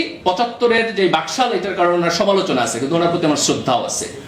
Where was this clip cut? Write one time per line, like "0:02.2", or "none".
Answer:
none